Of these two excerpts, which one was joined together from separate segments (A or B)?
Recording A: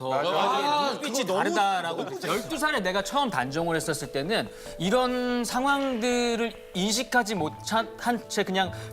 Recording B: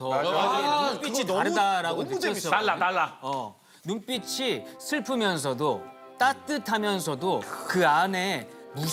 A